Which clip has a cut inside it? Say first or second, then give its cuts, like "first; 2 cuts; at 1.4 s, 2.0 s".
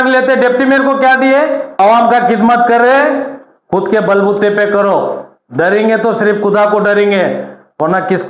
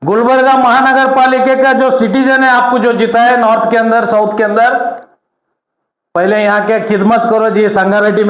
first; 1 cut; at 1.8 s